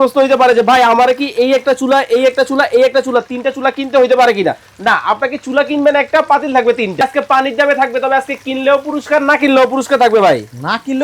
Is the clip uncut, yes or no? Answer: no